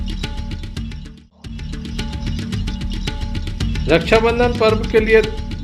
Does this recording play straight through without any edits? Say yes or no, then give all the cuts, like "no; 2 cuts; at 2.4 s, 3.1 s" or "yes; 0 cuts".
no; 2 cuts; at 1.7 s, 3.8 s